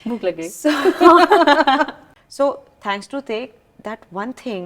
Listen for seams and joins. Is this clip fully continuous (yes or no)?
no